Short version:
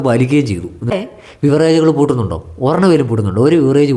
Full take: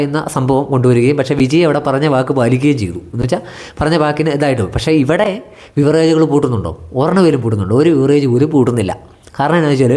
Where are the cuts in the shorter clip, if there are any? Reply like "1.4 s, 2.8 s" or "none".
0.9 s